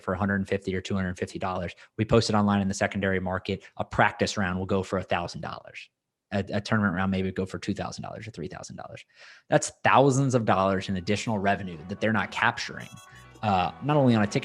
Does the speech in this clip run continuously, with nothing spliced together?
yes; 0 cuts

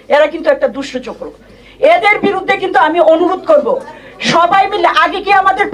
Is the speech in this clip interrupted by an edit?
no; 0 cuts

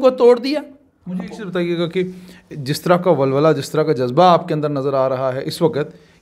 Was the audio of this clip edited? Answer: no; 0 cuts

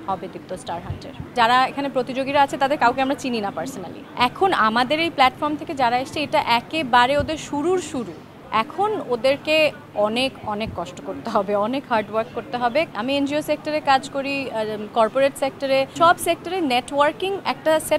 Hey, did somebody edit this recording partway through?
yes; 5 cuts; at 1.3 s, 3.9 s, 8.3 s, 12.9 s, 15.9 s

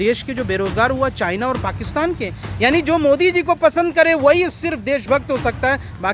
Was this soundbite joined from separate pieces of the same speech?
no; 0 cuts

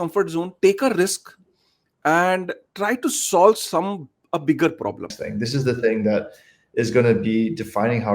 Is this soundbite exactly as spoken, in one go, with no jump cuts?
no; 1 cut; at 5.2 s

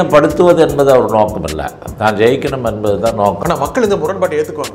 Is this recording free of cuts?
no; 1 cut; at 3.4 s

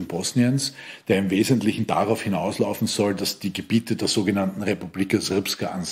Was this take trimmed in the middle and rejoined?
no; 0 cuts

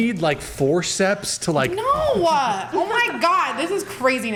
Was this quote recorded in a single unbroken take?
yes; 0 cuts

